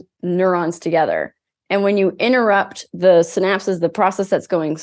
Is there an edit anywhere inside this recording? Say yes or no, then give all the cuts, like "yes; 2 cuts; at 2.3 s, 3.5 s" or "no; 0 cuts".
no; 0 cuts